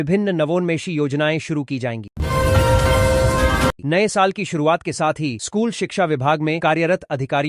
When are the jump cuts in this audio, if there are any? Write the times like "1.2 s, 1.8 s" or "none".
none